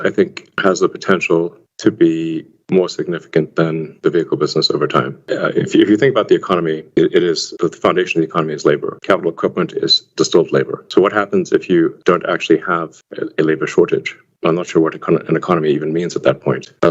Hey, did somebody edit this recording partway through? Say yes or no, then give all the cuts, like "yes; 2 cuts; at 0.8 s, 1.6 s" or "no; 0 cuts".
no; 0 cuts